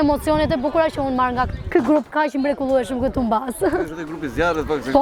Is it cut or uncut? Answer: uncut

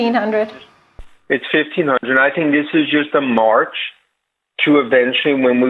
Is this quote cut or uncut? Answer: uncut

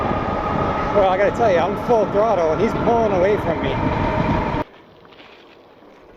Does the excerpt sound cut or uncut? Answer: cut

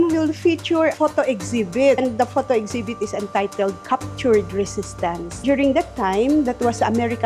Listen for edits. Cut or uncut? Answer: cut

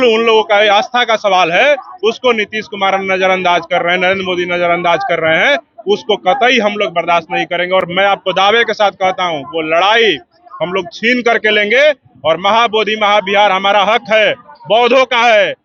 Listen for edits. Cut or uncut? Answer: uncut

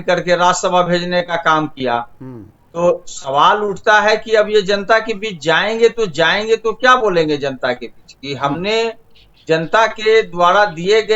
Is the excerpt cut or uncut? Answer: uncut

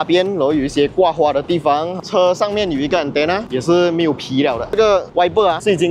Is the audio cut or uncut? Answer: cut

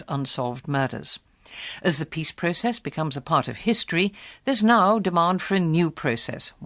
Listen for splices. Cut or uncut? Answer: cut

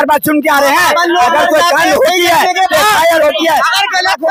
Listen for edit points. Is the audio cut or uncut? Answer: uncut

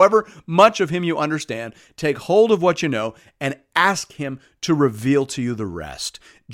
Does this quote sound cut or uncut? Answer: uncut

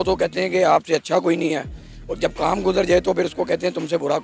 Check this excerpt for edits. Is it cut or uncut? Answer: uncut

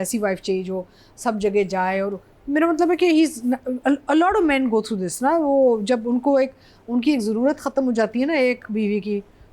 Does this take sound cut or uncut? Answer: uncut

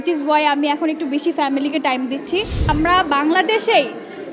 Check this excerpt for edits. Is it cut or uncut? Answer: cut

